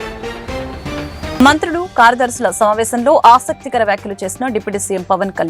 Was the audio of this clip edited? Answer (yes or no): yes